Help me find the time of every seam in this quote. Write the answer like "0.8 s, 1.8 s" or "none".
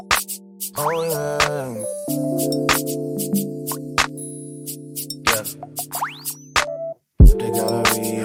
none